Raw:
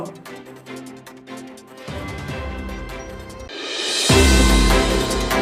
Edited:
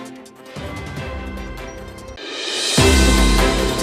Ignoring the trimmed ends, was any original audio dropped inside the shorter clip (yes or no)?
no